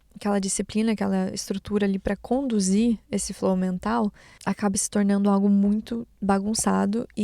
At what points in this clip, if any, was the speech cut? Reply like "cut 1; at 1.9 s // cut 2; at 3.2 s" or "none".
cut 1; at 4.3 s